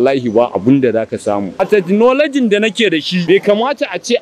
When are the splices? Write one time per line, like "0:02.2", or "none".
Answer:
0:01.6
0:03.2

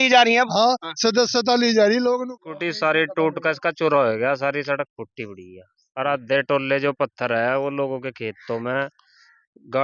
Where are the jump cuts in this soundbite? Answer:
0:02.2

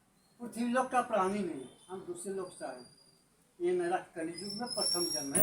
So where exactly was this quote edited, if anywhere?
none

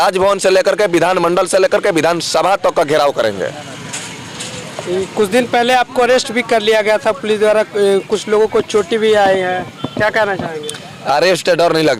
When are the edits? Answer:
none

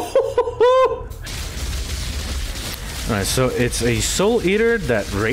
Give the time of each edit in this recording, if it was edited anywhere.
0:01.2

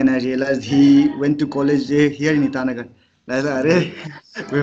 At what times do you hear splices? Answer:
none

